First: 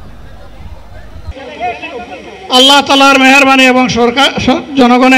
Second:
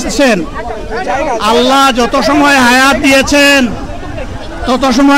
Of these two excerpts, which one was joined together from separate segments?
first; 1 cut; at 1.3 s

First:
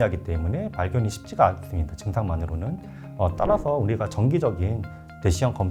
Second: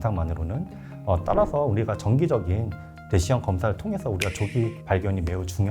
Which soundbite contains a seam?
second; 1 cut; at 4.8 s

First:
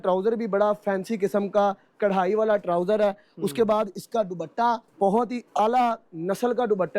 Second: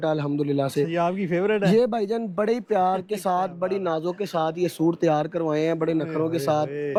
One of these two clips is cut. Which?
first; 1 cut; at 4.9 s

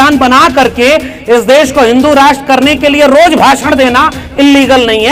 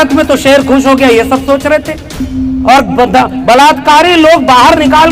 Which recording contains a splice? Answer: second; 1 cut; at 2.3 s

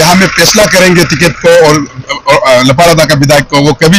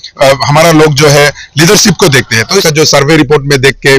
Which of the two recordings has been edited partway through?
second; 1 cut; at 2.7 s

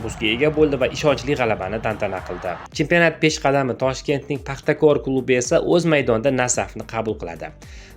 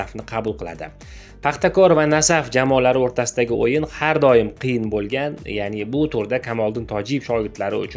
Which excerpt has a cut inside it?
first; 1 cut; at 2.6 s

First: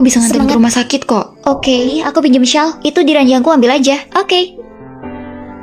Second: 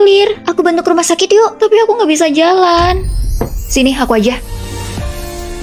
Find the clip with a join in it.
first; 1 cut; at 2.0 s

